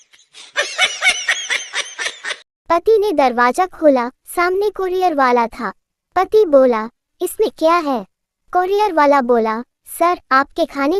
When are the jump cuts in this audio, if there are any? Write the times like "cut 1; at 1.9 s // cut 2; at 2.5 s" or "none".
cut 1; at 2.4 s